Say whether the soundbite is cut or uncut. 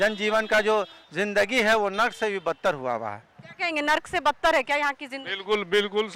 uncut